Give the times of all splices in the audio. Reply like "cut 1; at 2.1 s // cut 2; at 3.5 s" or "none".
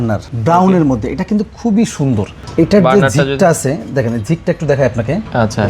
cut 1; at 2.4 s